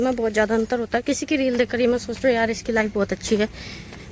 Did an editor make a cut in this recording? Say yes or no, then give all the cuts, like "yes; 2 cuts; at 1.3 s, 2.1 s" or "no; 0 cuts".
no; 0 cuts